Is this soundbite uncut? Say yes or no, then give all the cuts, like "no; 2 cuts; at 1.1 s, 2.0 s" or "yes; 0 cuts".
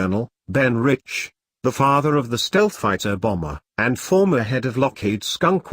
no; 1 cut; at 4.7 s